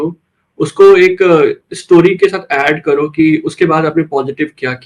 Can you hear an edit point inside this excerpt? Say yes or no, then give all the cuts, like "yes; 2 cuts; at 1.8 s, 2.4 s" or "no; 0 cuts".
no; 0 cuts